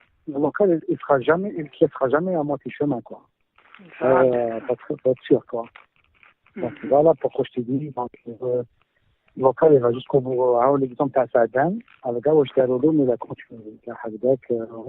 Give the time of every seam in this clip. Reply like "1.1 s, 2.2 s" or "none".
4.5 s